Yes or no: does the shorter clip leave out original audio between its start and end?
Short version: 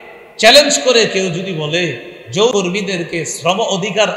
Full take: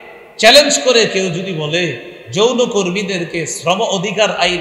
yes